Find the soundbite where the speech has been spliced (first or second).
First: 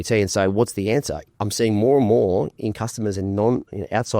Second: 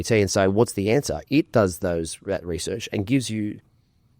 first